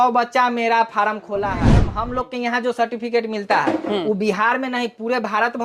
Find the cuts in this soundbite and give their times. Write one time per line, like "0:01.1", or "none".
0:01.9